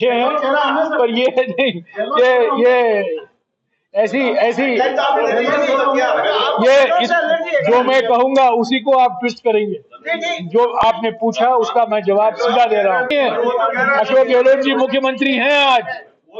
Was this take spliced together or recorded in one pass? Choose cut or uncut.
cut